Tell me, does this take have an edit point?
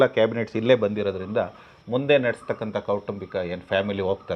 no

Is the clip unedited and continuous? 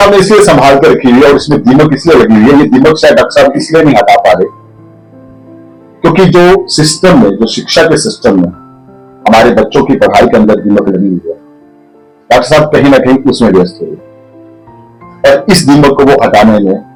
yes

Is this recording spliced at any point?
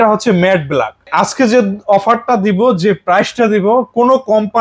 yes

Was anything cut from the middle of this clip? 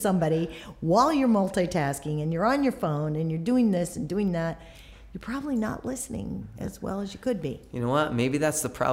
no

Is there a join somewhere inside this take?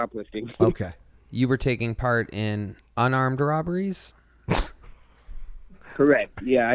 no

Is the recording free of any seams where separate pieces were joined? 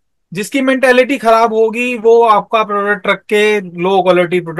yes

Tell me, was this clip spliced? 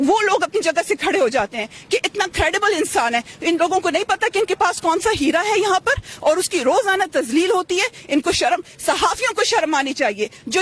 no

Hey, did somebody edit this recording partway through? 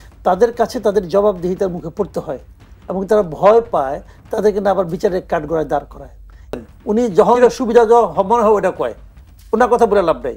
yes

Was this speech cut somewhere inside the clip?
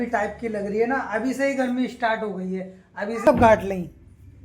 yes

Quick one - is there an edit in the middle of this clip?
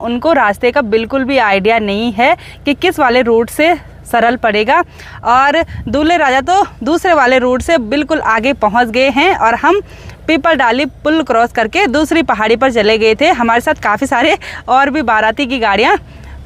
no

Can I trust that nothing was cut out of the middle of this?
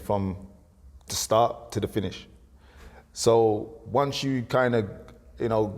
yes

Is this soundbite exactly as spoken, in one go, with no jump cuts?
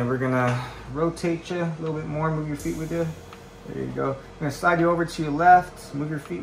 yes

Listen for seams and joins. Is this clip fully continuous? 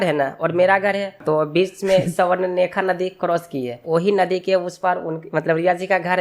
no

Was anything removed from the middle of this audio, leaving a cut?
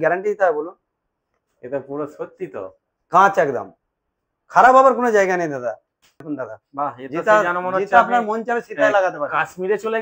yes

